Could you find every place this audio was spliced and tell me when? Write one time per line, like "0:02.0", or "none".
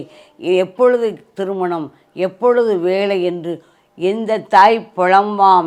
none